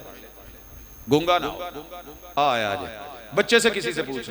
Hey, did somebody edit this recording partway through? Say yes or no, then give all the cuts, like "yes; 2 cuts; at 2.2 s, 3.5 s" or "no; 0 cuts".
yes; 1 cut; at 2.3 s